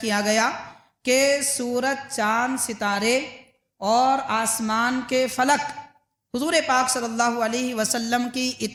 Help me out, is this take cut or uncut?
uncut